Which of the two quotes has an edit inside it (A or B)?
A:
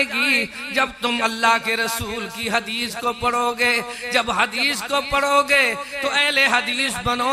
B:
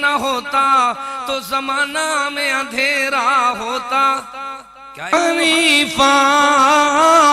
B